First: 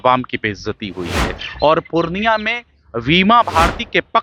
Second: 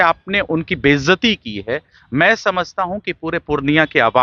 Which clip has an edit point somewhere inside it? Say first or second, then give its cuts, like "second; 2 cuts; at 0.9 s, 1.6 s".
first; 1 cut; at 1.4 s